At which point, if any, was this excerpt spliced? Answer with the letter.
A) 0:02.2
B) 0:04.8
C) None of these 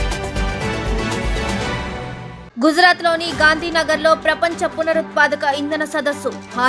A